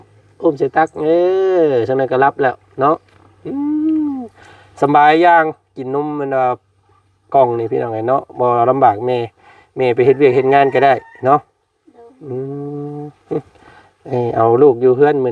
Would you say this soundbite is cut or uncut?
uncut